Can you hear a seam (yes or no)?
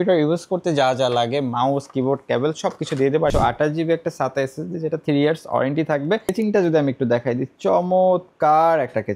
yes